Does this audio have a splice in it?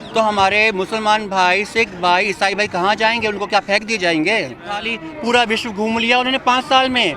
yes; 1 cut; at 4.9 s

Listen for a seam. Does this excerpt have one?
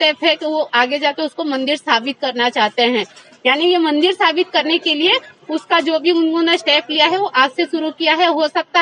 no; 0 cuts

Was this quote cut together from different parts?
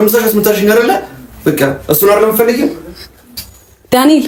no; 0 cuts

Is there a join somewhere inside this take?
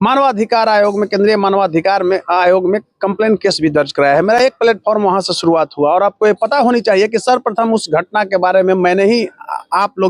no; 0 cuts

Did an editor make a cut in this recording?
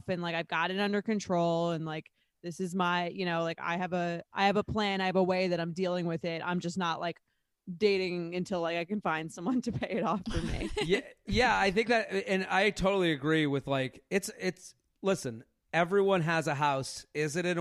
no; 0 cuts

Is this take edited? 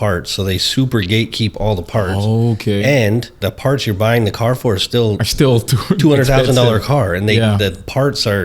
yes; 1 cut; at 3.3 s

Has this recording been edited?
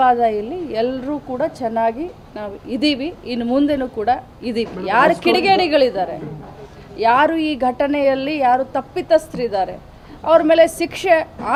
no; 0 cuts

